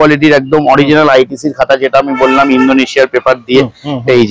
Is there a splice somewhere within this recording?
no; 0 cuts

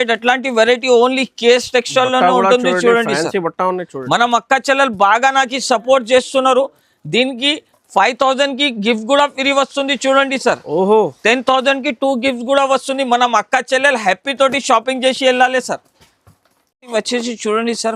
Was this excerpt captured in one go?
yes; 0 cuts

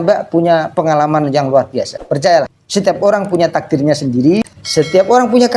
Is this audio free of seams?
no; 3 cuts; at 1.9 s, 2.6 s, 4.4 s

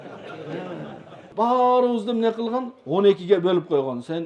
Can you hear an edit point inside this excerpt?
yes; 1 cut; at 1.3 s

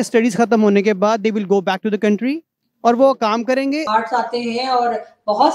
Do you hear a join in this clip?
yes; 1 cut; at 3.8 s

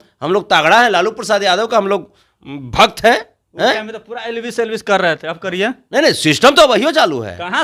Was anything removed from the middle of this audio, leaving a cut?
no; 0 cuts

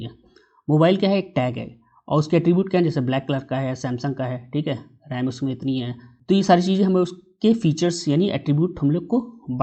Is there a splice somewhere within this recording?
no; 0 cuts

